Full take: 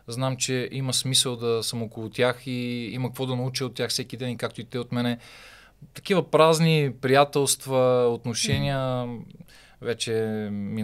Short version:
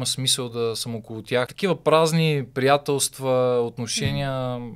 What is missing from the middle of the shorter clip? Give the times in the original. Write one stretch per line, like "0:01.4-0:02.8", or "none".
0:02.4-0:06.0